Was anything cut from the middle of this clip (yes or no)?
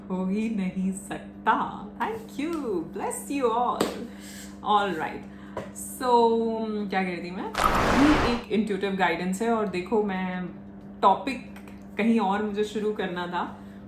yes